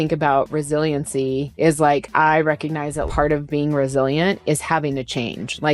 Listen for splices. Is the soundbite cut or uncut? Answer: cut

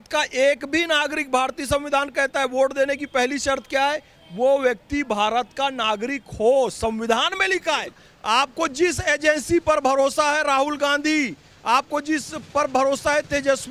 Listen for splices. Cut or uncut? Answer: cut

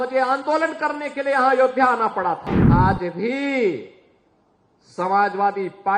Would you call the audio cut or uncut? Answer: cut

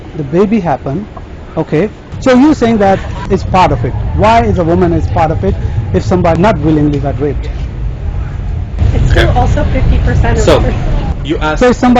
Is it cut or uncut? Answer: cut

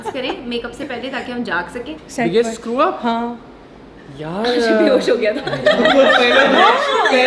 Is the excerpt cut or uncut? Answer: cut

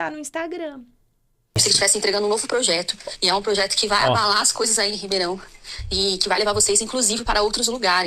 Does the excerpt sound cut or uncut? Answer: cut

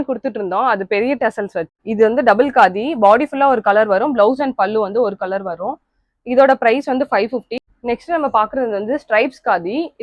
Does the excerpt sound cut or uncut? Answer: cut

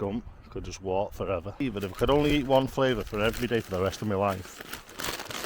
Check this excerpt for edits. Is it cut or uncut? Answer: cut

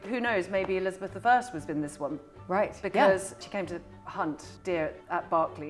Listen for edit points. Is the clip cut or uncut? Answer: cut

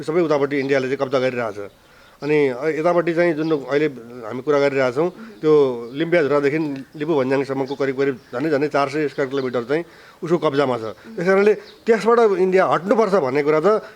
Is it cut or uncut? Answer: uncut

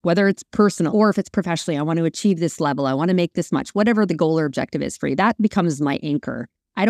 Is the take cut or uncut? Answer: cut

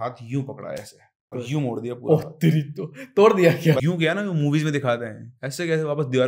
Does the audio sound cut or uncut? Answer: cut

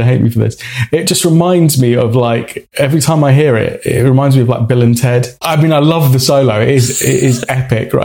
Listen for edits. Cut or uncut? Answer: cut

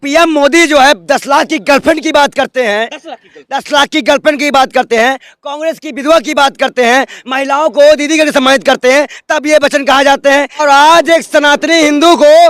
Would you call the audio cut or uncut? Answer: cut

